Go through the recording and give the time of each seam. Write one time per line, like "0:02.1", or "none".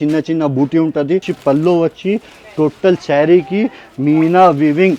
0:01.3